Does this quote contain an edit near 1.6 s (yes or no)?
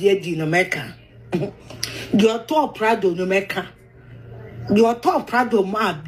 no